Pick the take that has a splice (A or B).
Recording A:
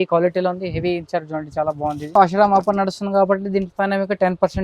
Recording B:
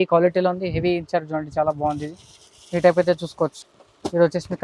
A